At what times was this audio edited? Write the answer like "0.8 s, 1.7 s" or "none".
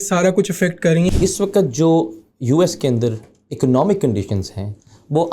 1.1 s